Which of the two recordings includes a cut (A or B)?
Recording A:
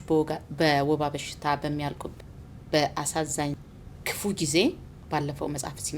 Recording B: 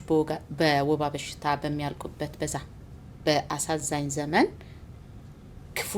A